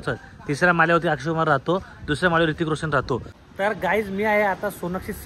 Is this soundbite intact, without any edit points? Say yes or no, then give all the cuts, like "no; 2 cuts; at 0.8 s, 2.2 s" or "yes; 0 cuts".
no; 1 cut; at 3.4 s